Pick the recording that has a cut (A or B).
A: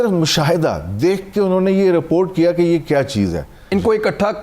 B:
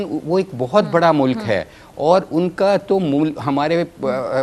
A